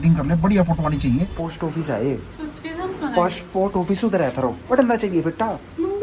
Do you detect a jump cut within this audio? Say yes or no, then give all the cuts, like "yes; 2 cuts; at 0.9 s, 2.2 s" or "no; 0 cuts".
yes; 2 cuts; at 1.3 s, 4.6 s